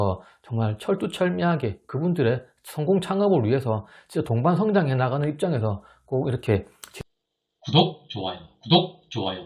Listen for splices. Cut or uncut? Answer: cut